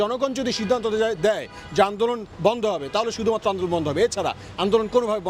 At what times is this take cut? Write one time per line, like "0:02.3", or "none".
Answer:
none